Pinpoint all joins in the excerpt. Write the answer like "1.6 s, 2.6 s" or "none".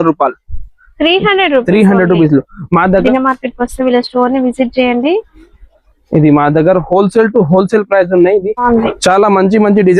3.0 s, 8.6 s